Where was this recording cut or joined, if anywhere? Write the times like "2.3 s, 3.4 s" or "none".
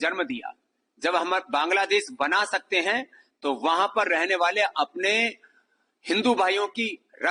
none